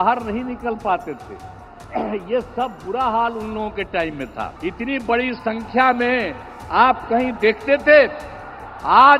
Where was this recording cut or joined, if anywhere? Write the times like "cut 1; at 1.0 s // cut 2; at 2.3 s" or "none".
cut 1; at 4.5 s